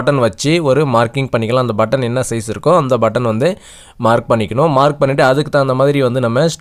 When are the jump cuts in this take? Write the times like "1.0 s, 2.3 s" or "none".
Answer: none